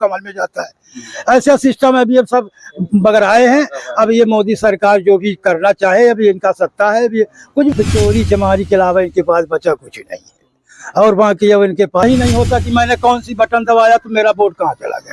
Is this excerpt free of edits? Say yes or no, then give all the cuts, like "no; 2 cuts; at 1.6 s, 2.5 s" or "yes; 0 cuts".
no; 2 cuts; at 7.7 s, 12.0 s